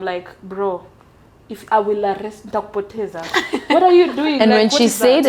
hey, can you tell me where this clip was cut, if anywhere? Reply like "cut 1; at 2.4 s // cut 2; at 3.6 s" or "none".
none